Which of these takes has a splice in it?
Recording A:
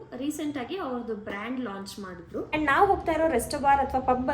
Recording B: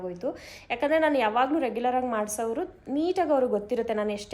A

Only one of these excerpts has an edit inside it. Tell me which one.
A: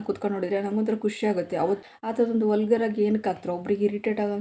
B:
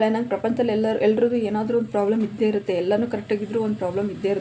A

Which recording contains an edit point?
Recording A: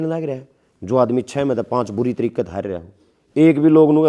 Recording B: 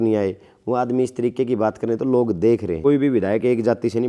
B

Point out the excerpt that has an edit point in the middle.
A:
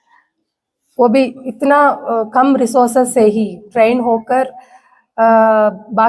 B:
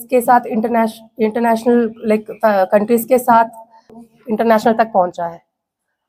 B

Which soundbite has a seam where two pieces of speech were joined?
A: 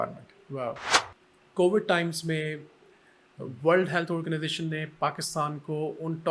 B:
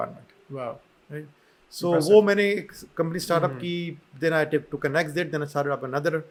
A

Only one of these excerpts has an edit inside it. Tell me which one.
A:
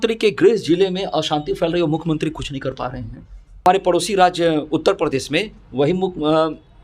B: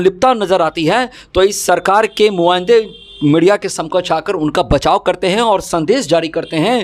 A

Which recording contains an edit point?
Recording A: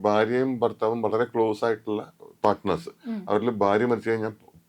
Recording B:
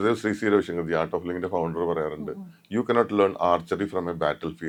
A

